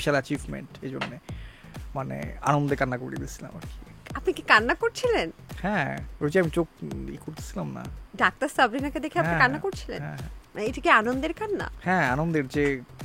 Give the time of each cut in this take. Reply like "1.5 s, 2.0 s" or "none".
none